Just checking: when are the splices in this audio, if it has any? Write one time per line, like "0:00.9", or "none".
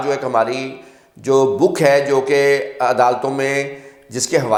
none